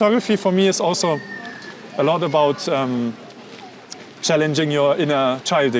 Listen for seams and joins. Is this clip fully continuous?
yes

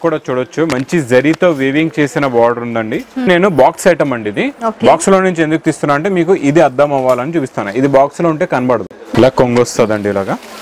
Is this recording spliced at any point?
yes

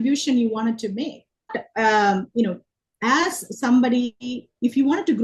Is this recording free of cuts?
no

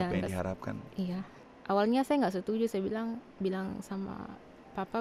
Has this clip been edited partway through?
yes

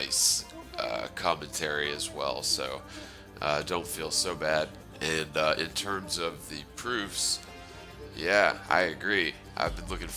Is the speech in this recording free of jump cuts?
no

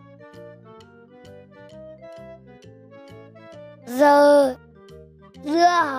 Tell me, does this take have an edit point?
yes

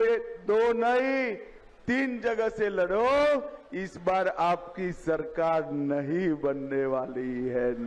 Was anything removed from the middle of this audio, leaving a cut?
no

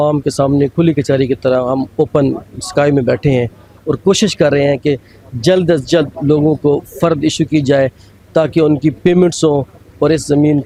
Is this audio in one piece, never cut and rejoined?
yes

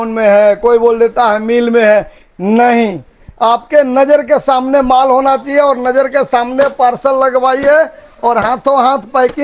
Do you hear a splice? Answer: no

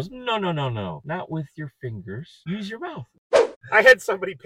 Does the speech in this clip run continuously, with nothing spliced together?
no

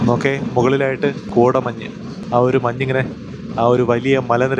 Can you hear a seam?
yes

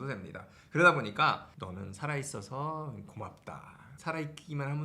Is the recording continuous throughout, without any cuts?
no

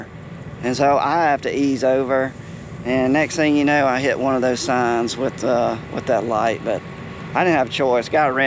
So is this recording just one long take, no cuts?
yes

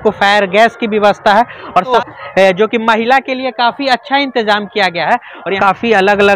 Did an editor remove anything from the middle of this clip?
yes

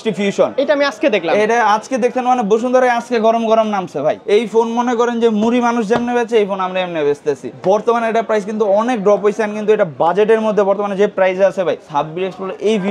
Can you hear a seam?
yes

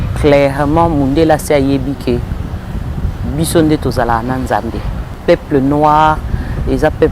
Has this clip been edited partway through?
yes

